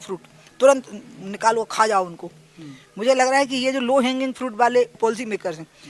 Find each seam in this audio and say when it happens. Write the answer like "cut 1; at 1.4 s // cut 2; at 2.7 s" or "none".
cut 1; at 5.0 s